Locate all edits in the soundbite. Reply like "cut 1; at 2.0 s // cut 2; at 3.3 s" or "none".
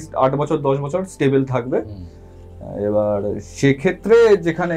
none

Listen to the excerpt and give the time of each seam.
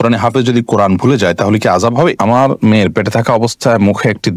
cut 1; at 2.2 s

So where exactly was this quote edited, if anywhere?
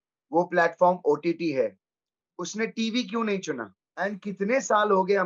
cut 1; at 3.8 s

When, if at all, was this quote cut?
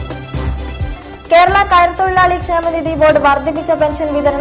cut 1; at 0.9 s

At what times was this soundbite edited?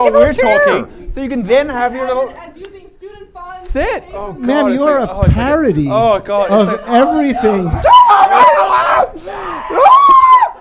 none

